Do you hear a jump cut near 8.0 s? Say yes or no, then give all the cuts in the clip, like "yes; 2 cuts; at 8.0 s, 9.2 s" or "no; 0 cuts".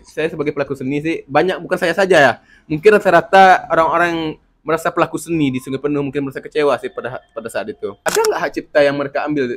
yes; 1 cut; at 8.0 s